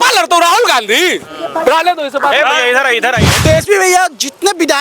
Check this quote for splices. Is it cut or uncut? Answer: cut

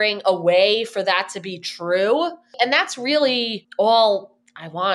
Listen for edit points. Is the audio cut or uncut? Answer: cut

